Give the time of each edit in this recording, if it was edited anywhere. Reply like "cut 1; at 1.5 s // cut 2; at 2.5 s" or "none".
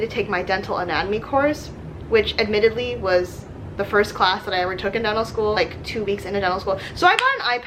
none

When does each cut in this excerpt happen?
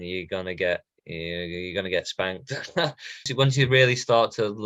cut 1; at 3.2 s

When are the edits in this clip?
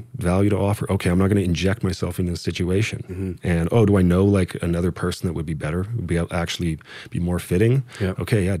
none

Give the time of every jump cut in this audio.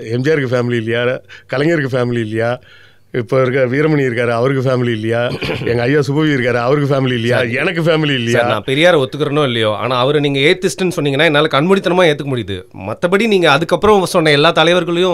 none

